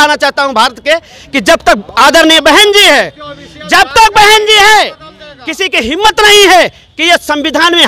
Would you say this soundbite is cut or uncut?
uncut